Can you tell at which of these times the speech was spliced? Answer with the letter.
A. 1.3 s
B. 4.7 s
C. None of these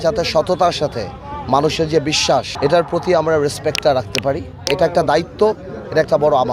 B